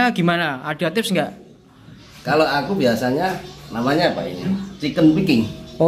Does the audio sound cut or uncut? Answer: uncut